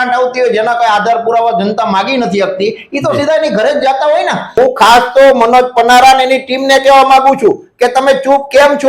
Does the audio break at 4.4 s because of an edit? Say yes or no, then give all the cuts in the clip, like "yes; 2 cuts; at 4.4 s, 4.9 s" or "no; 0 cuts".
yes; 1 cut; at 4.4 s